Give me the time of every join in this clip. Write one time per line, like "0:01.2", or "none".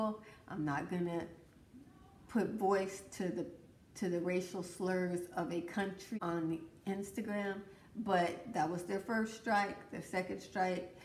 0:06.2